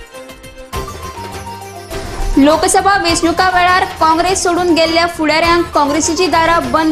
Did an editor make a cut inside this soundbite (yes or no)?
yes